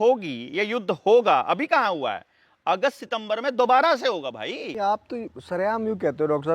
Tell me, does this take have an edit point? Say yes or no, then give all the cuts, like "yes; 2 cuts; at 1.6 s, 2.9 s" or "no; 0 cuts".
yes; 1 cut; at 4.7 s